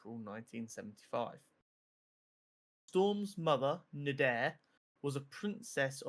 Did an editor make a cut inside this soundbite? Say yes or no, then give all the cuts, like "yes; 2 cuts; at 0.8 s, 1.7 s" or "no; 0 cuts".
no; 0 cuts